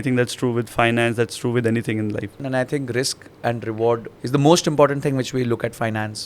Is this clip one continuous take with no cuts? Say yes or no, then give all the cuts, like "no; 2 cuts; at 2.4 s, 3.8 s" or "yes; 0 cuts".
no; 2 cuts; at 2.4 s, 4.1 s